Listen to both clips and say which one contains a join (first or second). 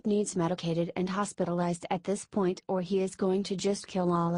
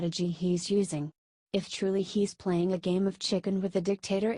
second